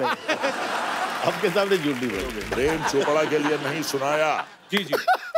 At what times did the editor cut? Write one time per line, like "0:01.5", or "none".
0:02.4

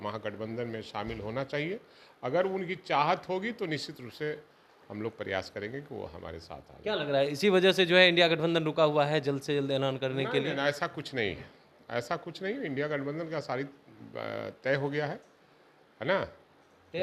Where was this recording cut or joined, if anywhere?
none

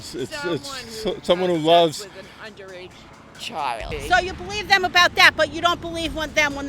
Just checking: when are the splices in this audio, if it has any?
0:03.9

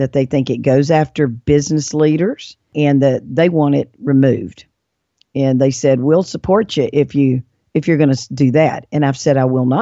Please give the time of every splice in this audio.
none

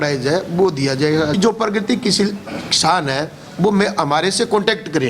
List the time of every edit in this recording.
0:01.4

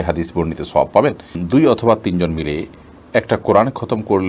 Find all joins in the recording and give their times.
0:01.4

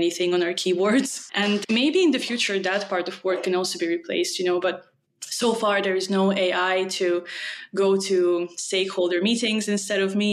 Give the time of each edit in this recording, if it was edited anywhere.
0:01.4

